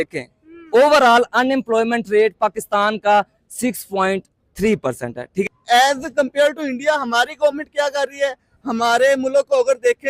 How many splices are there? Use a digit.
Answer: 1